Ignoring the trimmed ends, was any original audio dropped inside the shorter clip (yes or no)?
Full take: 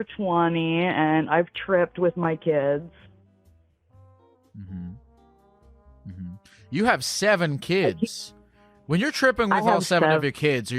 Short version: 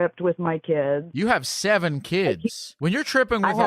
yes